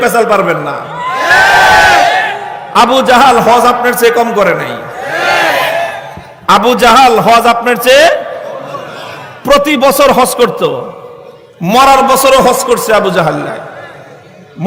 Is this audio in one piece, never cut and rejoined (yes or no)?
yes